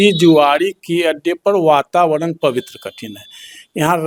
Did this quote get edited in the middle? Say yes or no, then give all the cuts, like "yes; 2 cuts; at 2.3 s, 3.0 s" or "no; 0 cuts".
no; 0 cuts